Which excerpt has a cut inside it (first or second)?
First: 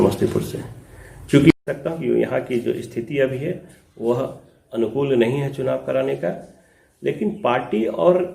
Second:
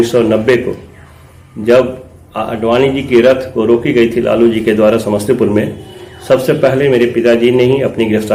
first